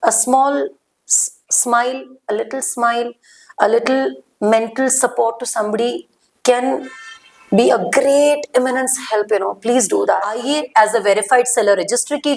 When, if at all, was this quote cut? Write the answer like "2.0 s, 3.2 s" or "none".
10.4 s